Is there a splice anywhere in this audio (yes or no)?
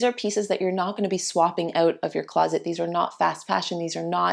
no